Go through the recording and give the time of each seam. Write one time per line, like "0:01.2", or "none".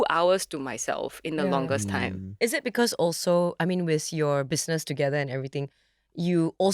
none